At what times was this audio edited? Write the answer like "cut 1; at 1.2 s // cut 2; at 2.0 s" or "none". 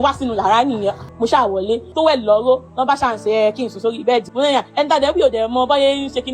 cut 1; at 1.1 s // cut 2; at 1.9 s // cut 3; at 4.3 s